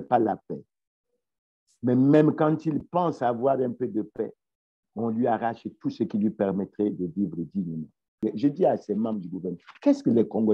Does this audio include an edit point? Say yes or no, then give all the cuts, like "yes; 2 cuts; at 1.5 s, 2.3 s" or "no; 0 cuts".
yes; 1 cut; at 8.1 s